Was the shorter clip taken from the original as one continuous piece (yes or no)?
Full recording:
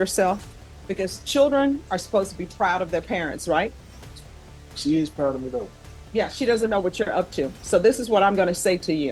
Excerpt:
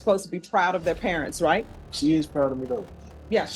no